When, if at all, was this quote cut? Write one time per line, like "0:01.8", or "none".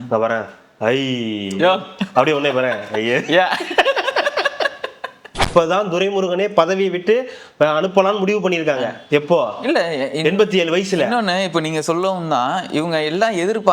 0:05.4